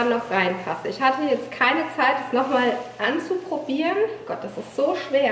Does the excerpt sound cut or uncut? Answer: uncut